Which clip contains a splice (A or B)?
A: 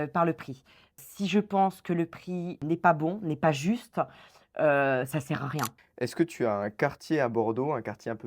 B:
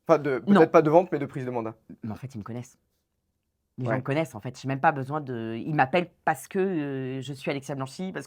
A